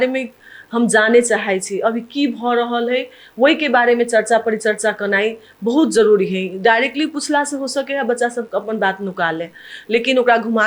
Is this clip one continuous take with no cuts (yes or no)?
yes